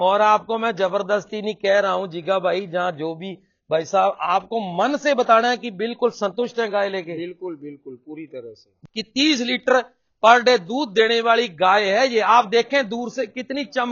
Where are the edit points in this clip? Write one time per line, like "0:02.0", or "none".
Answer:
0:08.7